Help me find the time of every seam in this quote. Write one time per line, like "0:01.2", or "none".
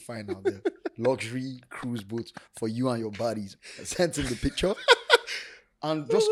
none